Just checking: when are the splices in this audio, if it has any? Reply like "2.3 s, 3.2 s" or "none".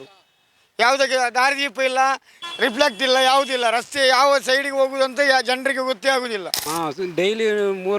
6.5 s